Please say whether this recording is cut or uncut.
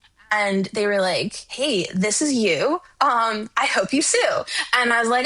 uncut